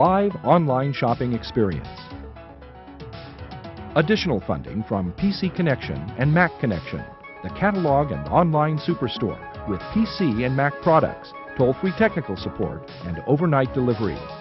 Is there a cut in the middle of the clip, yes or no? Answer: yes